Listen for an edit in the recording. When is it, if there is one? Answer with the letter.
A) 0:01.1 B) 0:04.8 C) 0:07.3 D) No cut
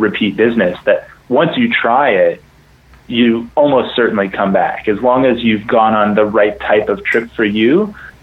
D